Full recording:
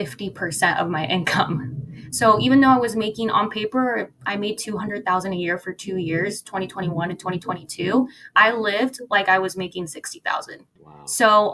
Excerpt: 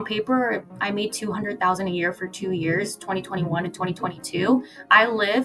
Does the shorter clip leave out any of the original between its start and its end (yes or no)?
no